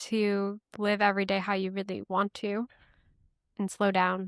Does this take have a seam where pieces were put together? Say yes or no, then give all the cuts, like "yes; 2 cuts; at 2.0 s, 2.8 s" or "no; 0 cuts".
no; 0 cuts